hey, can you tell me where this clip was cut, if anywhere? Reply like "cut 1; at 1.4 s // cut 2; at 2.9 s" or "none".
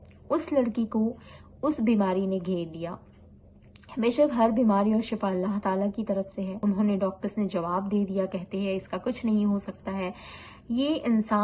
cut 1; at 6.6 s